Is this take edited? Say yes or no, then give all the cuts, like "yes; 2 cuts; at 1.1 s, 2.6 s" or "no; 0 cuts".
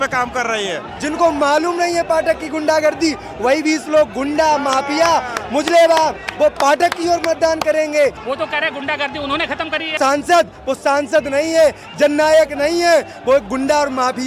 yes; 3 cuts; at 0.9 s, 8.2 s, 10.0 s